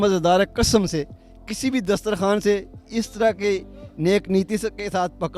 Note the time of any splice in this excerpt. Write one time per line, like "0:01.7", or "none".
none